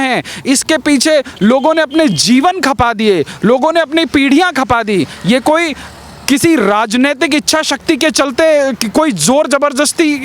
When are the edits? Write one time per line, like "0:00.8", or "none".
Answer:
none